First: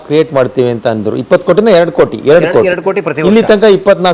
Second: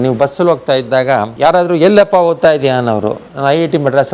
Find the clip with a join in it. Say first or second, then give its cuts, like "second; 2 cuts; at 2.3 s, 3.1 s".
second; 2 cuts; at 1.3 s, 3.3 s